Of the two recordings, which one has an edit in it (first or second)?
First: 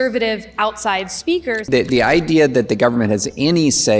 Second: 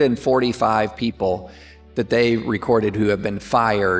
first